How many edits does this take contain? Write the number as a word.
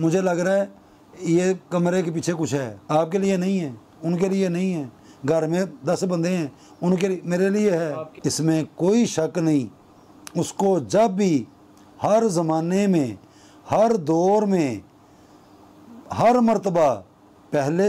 two